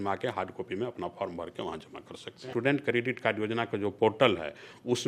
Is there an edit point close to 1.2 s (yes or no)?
no